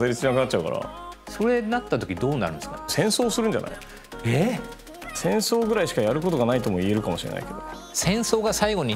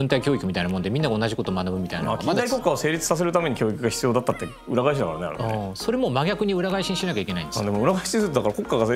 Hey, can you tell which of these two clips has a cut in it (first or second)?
first